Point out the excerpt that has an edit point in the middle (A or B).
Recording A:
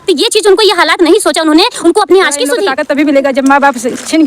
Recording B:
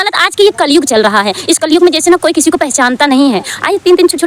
A